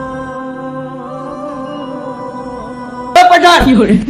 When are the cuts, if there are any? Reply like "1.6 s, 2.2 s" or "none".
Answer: 3.2 s